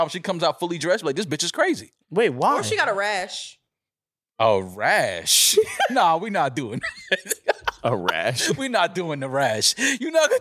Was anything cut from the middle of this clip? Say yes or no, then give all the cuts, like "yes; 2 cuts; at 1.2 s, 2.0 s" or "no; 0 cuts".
no; 0 cuts